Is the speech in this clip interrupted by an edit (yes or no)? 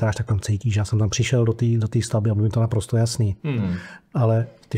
no